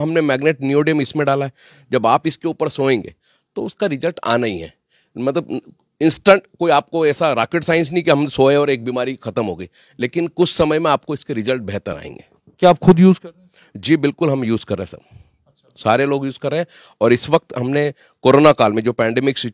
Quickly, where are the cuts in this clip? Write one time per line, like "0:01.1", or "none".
none

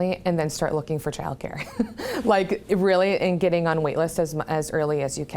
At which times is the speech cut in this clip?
none

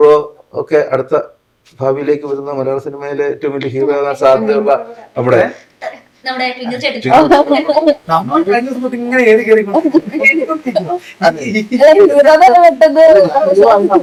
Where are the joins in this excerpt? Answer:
none

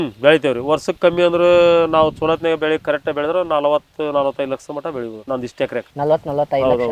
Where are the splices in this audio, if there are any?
none

